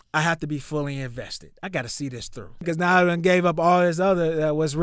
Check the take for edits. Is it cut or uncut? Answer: cut